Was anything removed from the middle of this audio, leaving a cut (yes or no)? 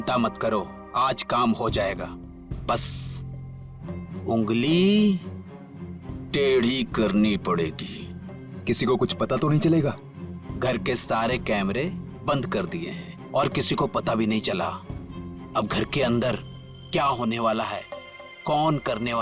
no